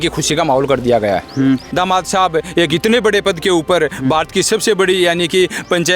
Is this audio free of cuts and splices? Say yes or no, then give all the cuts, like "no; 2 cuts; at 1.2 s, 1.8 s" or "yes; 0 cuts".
no; 1 cut; at 1.7 s